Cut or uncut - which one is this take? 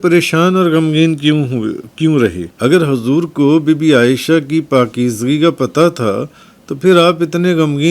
cut